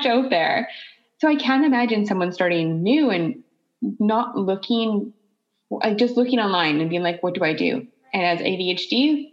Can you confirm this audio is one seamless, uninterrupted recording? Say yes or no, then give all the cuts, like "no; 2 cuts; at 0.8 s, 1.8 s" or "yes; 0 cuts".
yes; 0 cuts